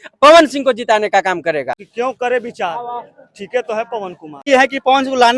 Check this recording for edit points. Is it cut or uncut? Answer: cut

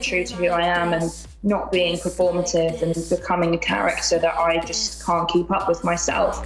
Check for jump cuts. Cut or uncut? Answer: uncut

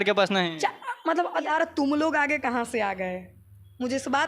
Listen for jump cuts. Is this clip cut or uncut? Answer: cut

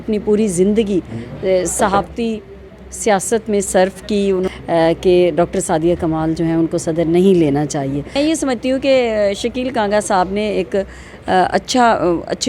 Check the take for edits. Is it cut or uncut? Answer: cut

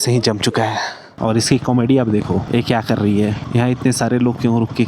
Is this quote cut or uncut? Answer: cut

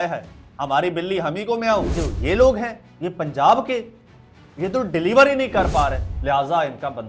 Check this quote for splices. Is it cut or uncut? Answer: cut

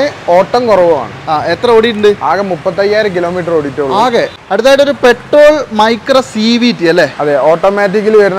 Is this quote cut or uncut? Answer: cut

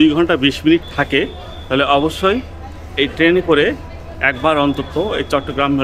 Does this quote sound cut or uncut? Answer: uncut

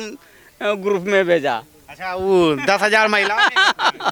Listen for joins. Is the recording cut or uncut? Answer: uncut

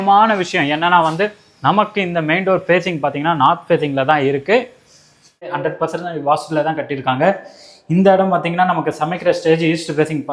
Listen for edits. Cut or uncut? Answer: cut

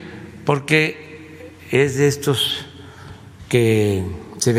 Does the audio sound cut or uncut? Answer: uncut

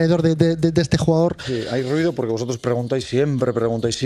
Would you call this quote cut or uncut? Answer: uncut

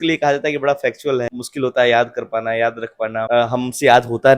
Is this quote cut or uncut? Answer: cut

